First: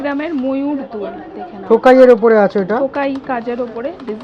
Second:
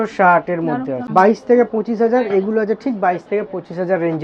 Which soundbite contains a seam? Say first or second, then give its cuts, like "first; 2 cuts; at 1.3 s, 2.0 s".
second; 1 cut; at 1.0 s